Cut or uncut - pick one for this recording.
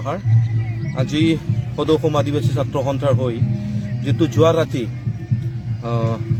uncut